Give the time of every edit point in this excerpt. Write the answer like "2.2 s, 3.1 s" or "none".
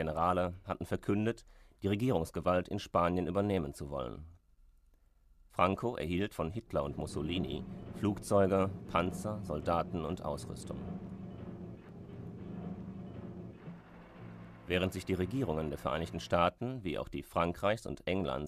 none